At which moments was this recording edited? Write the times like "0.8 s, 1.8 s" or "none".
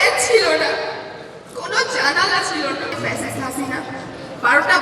3.0 s